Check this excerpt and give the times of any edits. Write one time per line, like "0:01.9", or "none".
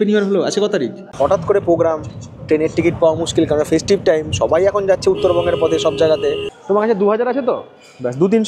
0:01.1
0:06.5